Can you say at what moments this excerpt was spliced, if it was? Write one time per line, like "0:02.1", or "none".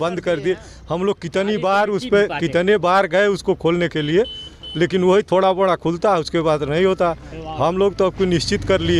none